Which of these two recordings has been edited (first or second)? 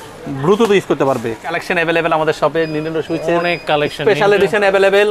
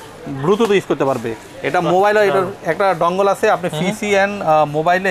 first